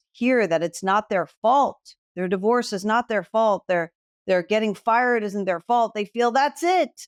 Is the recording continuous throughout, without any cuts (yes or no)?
yes